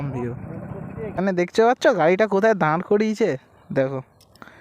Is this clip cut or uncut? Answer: cut